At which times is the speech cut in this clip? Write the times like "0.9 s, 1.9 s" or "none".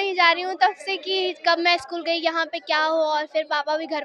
none